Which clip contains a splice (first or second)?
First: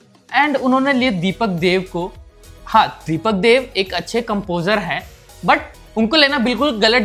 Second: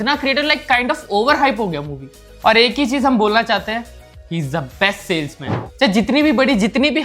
second